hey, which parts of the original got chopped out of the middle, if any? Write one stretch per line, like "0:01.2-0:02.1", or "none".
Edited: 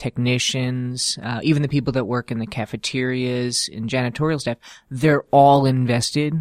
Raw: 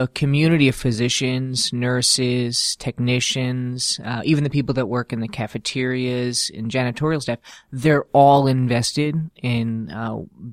none